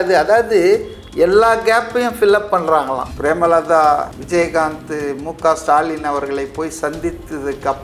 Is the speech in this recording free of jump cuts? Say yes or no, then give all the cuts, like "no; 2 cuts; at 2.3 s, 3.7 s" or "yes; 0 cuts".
no; 1 cut; at 3.1 s